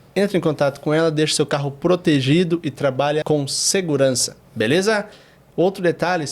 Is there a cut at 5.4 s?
no; 1 cut; at 3.2 s

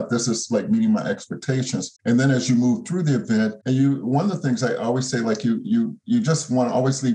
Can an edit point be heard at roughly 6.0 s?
no; 2 cuts; at 1.9 s, 3.6 s

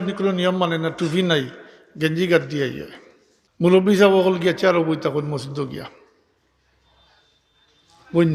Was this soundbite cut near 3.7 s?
yes; 1 cut; at 3.7 s

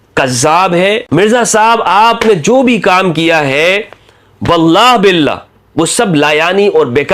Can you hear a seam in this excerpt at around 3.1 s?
no; 1 cut; at 1.0 s

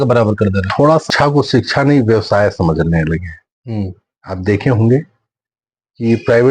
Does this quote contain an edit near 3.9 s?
no; 1 cut; at 1.0 s

